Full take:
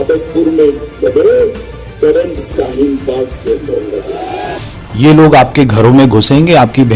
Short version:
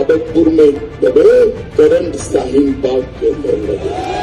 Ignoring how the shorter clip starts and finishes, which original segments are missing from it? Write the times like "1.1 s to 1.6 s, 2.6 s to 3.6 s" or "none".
1.6 s to 1.9 s